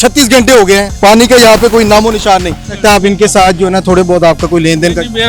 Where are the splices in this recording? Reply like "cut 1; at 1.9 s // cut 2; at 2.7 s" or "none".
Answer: cut 1; at 0.9 s // cut 2; at 2.7 s